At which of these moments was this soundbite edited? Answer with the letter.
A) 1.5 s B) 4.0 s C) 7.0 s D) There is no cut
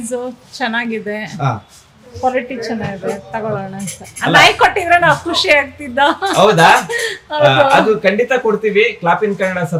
D